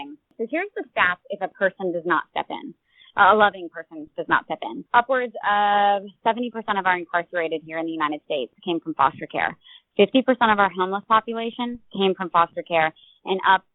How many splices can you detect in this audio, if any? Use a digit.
1